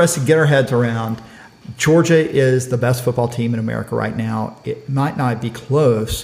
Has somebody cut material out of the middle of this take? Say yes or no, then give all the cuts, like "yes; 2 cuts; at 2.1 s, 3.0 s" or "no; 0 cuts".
no; 0 cuts